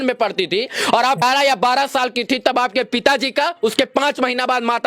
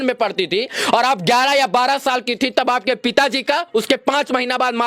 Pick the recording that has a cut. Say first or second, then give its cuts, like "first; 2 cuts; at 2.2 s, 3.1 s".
first; 1 cut; at 1.2 s